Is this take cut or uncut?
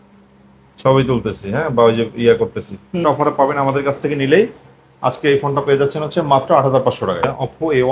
cut